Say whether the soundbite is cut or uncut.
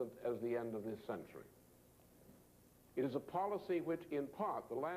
uncut